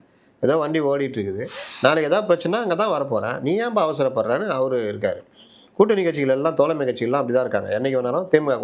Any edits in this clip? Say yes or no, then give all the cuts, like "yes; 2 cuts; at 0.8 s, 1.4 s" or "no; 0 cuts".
no; 0 cuts